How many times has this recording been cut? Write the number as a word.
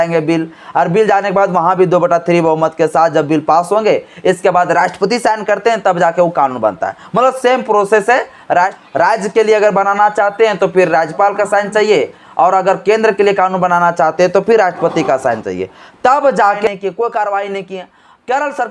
one